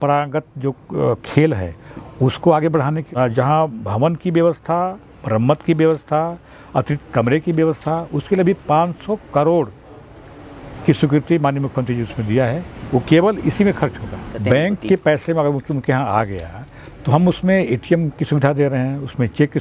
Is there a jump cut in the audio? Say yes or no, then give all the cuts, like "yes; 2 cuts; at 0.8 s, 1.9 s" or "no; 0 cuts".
yes; 2 cuts; at 3.0 s, 14.3 s